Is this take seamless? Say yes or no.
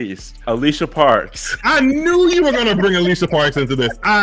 yes